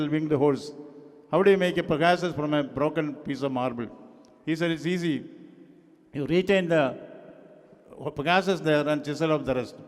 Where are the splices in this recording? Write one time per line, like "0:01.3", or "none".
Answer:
none